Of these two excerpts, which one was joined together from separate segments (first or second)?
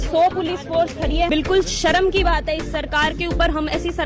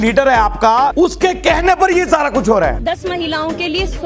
second